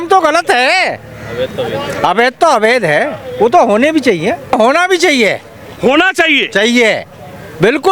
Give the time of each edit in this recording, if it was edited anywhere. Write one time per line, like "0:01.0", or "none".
0:04.5